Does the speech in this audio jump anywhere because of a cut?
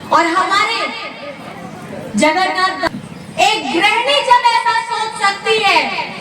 yes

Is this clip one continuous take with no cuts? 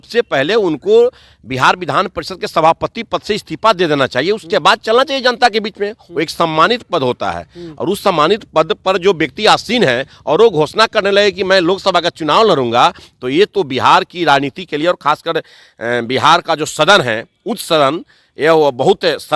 yes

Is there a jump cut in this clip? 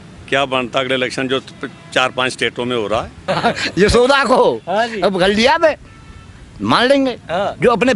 yes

